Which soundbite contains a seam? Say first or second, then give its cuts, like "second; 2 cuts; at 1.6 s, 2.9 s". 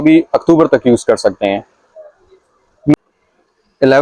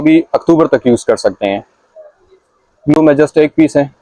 first; 1 cut; at 3.0 s